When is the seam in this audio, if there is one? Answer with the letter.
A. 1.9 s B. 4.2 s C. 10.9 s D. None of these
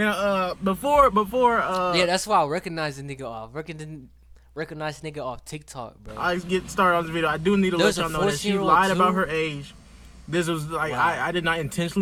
D